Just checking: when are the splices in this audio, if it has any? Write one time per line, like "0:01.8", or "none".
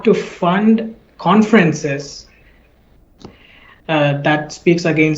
none